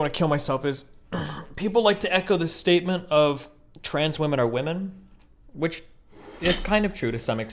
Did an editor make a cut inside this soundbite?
no; 0 cuts

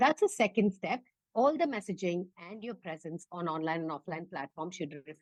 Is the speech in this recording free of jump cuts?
yes; 0 cuts

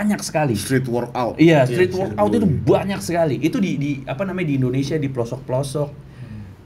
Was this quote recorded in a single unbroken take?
yes; 0 cuts

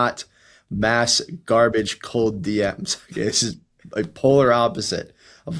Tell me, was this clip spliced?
no; 0 cuts

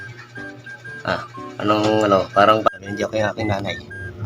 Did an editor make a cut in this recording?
yes; 1 cut; at 2.7 s

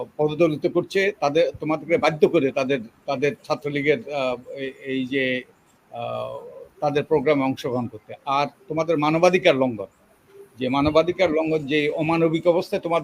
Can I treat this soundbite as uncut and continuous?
yes; 0 cuts

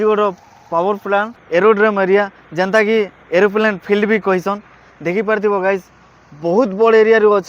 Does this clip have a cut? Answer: yes; 1 cut; at 1.4 s

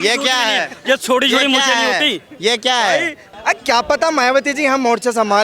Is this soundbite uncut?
no; 1 cut; at 3.2 s

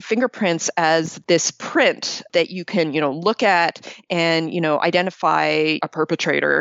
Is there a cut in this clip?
yes; 3 cuts; at 1.1 s, 2.3 s, 5.8 s

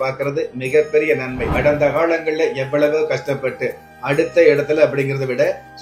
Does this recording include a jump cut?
yes; 1 cut; at 1.4 s

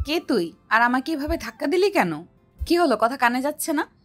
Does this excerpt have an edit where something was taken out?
yes; 1 cut; at 2.5 s

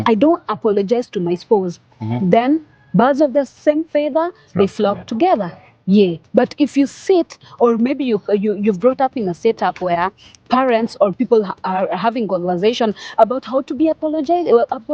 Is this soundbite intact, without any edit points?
yes; 0 cuts

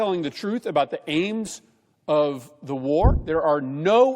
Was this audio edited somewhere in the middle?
yes; 1 cut; at 3.2 s

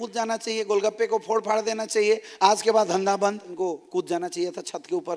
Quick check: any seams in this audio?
yes; 1 cut; at 3.5 s

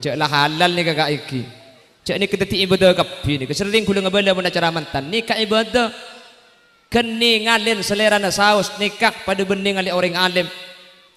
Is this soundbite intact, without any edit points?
yes; 0 cuts

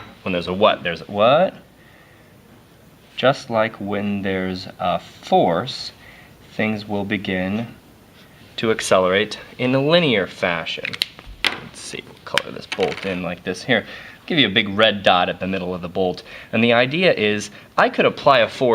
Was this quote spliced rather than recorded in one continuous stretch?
yes; 1 cut; at 17.4 s

